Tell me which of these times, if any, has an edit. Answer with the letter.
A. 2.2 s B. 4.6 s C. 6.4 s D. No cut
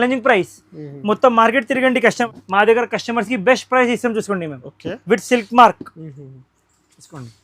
A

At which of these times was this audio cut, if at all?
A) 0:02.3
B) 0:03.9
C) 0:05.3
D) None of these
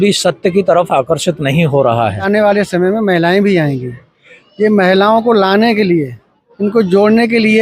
A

